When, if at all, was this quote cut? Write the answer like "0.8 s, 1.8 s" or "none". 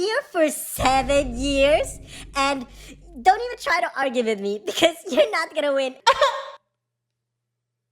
none